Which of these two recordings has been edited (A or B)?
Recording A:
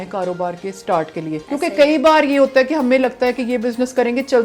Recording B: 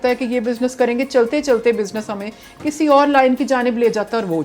A